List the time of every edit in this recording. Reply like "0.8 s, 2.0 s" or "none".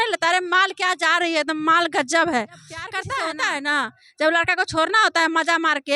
3.0 s